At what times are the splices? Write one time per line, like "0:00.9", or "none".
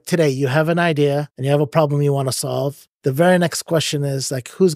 0:01.3
0:02.9